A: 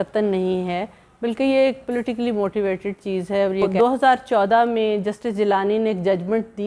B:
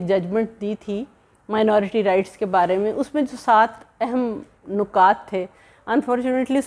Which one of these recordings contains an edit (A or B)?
A